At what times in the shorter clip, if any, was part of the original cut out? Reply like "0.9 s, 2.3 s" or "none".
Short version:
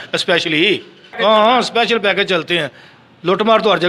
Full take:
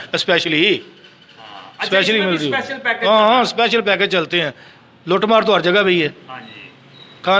1.0 s